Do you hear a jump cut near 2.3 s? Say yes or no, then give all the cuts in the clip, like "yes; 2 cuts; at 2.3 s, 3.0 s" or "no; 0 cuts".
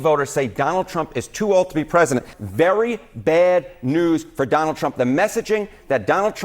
yes; 1 cut; at 2.3 s